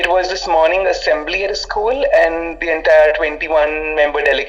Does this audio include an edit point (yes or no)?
no